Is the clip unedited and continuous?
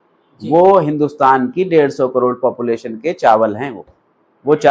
yes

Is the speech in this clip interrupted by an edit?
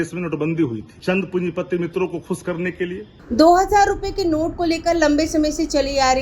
yes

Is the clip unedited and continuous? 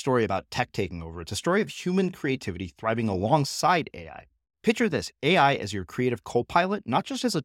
yes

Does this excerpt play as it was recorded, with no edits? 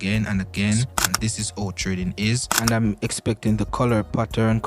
no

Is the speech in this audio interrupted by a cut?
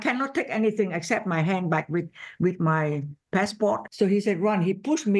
yes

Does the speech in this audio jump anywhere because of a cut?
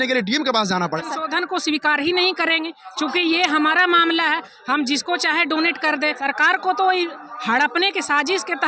yes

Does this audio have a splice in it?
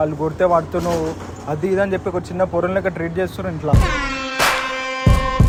no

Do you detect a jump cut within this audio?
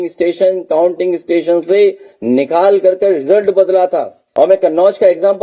yes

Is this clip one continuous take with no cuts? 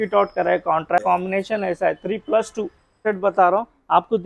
no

